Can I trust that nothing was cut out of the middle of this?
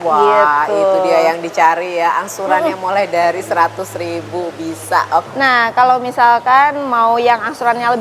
no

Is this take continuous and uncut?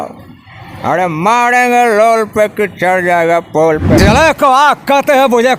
no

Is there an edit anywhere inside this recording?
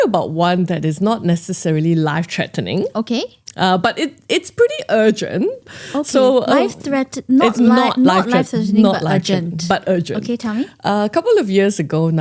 no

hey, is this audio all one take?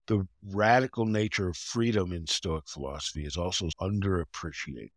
no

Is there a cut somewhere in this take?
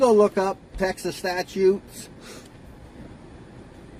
no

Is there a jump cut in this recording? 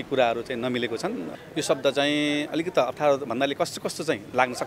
yes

